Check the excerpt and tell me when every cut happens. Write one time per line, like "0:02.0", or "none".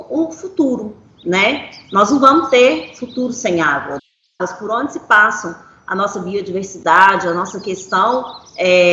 0:04.0